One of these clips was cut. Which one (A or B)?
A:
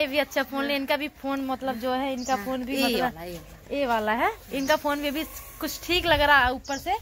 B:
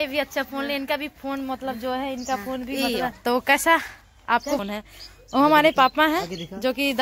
B